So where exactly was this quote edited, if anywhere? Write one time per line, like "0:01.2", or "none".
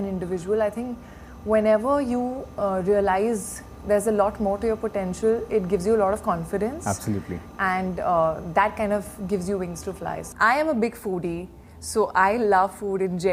0:10.3